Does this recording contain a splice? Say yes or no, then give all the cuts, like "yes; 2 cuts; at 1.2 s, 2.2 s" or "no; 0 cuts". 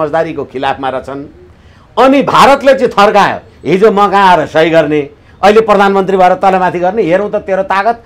no; 0 cuts